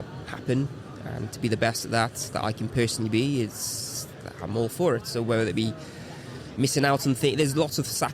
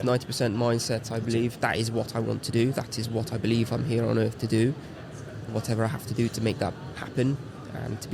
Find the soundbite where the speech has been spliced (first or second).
second